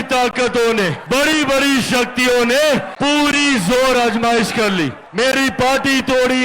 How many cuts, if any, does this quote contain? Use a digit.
3